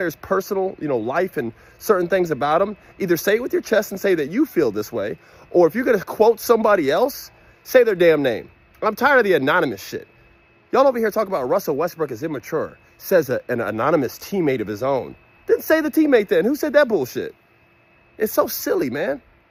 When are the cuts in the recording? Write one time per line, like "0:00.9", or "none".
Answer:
none